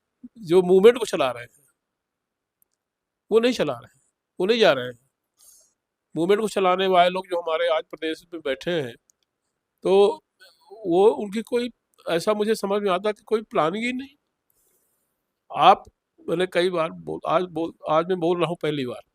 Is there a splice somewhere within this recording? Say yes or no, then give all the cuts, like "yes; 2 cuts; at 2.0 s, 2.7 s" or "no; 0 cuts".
no; 0 cuts